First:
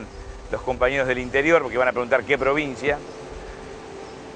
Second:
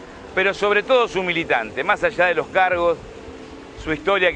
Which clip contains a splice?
first; 1 cut; at 2.8 s

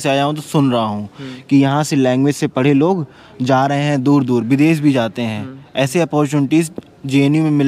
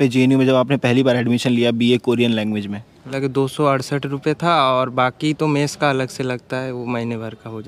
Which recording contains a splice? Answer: second; 1 cut; at 3.1 s

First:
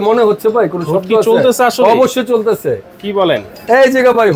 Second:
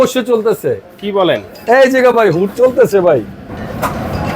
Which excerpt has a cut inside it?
second; 1 cut; at 3.4 s

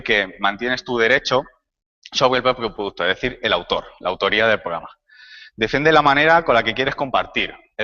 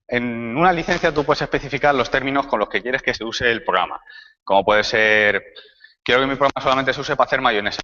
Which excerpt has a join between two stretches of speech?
second; 1 cut; at 1.9 s

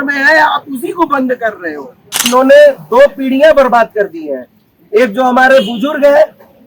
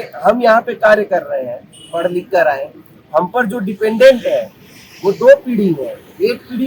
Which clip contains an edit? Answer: first; 1 cut; at 2.2 s

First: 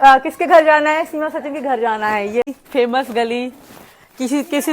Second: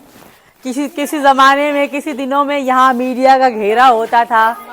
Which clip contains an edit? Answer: first; 1 cut; at 2.5 s

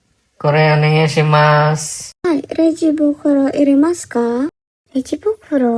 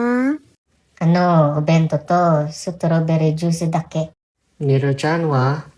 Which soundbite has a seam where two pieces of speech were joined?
first; 1 cut; at 2.2 s

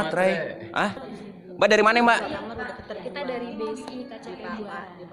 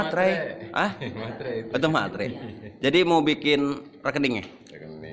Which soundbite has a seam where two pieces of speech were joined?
first; 1 cut; at 1.0 s

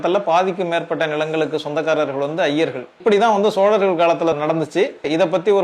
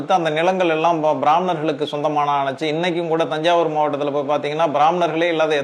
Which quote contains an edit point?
first; 2 cuts; at 3.0 s, 4.7 s

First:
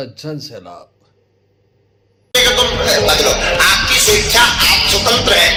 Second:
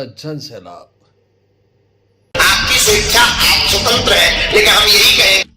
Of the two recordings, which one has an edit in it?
second; 1 cut; at 2.3 s

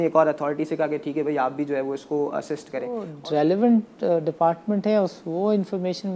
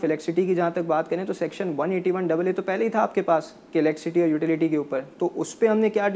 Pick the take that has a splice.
first; 1 cut; at 3.1 s

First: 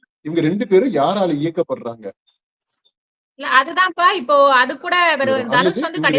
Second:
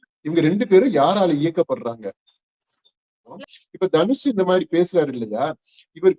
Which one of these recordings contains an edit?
second; 1 cut; at 3.4 s

